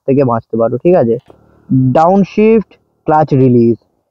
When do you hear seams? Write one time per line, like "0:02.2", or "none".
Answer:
0:01.3